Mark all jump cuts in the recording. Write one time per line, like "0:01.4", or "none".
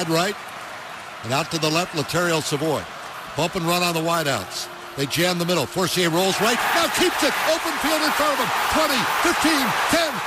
none